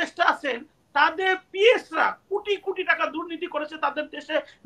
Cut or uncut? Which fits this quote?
uncut